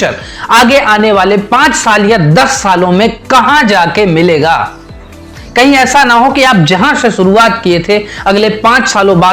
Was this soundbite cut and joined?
no; 0 cuts

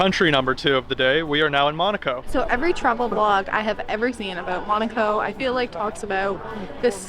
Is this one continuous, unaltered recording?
no; 1 cut; at 2.2 s

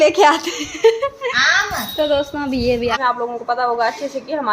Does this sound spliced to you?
yes; 1 cut; at 3.0 s

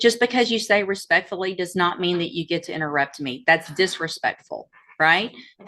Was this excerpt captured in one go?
yes; 0 cuts

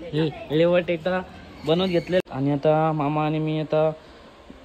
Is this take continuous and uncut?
no; 1 cut; at 2.2 s

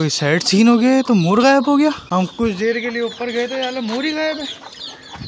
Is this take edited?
yes; 1 cut; at 2.0 s

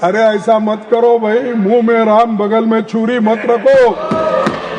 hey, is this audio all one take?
yes; 0 cuts

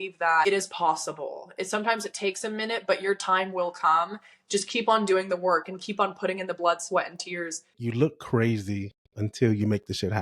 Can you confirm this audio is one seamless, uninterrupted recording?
no; 1 cut; at 7.7 s

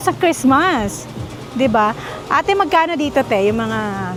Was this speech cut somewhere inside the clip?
no; 0 cuts

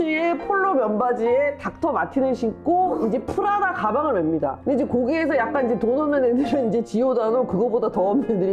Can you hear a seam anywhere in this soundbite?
no; 0 cuts

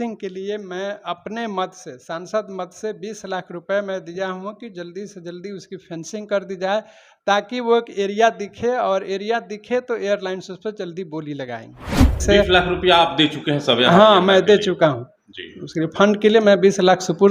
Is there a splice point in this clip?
yes; 1 cut; at 12.2 s

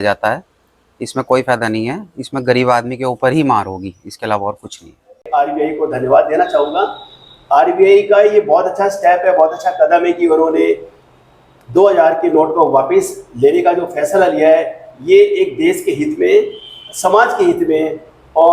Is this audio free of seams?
no; 1 cut; at 5.3 s

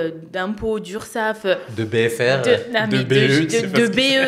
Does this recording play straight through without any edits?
yes; 0 cuts

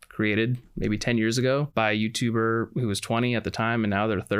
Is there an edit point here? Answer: yes; 1 cut; at 1.7 s

